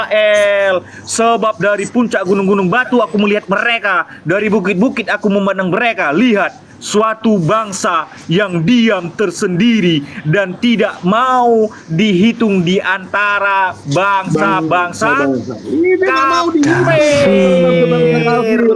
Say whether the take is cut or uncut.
uncut